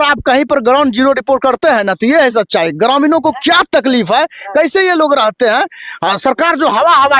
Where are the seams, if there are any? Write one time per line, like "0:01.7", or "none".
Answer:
none